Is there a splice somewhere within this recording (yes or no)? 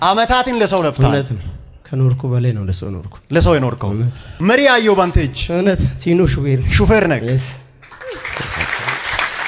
no